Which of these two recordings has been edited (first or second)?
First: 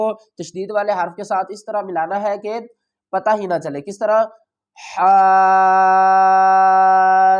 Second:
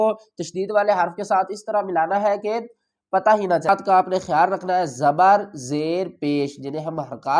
second